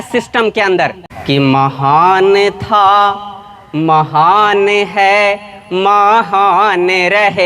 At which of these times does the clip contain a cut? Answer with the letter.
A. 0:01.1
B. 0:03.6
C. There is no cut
A